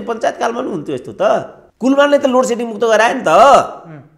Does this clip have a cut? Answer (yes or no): yes